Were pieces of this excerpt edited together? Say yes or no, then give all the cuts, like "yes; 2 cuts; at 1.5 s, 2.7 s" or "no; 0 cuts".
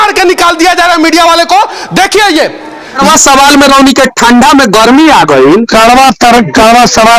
yes; 1 cut; at 3.0 s